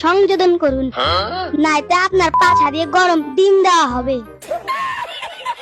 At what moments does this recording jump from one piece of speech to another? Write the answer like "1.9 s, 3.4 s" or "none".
4.3 s

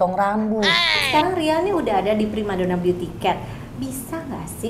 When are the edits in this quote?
0.9 s

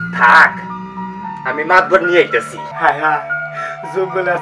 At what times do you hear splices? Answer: 2.7 s

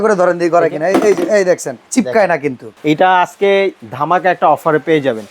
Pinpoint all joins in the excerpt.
1.8 s, 2.7 s, 3.9 s

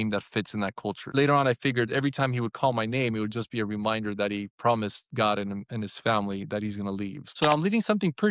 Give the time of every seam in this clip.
1.1 s, 7.2 s

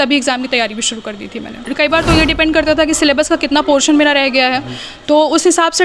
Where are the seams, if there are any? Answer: 1.6 s

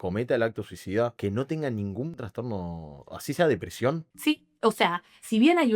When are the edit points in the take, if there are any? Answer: 1.2 s, 2.1 s, 4.1 s

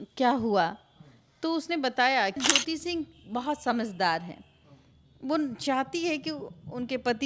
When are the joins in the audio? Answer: 2.4 s

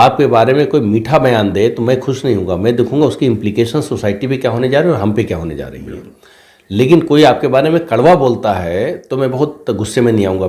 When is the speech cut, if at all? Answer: none

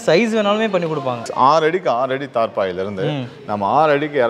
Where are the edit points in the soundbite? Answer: 1.2 s

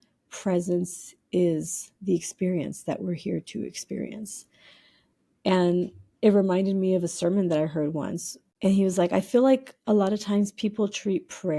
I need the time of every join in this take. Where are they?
8.4 s

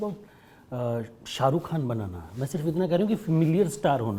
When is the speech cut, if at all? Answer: none

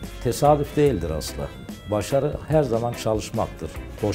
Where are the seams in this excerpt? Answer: none

